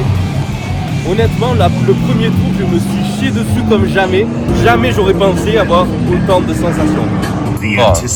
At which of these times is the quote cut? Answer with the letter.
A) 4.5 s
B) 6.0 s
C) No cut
C